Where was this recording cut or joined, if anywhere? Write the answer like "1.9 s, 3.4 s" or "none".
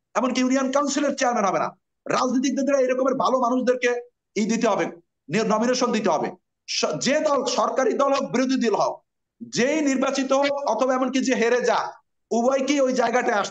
none